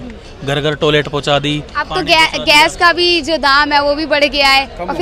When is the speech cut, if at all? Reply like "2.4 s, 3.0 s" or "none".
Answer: none